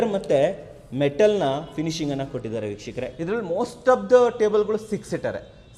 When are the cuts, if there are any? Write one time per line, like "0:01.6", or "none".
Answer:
0:03.1